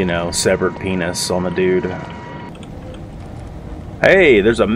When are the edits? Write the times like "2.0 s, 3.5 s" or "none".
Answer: 2.5 s